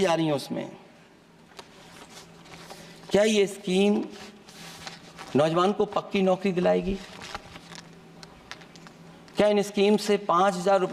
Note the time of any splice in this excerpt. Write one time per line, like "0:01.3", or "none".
none